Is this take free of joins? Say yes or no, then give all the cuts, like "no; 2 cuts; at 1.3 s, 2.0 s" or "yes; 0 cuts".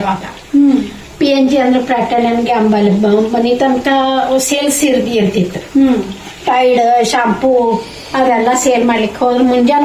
yes; 0 cuts